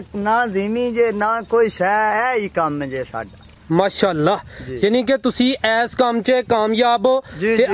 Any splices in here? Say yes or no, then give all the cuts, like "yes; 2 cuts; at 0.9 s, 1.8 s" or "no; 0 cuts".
no; 0 cuts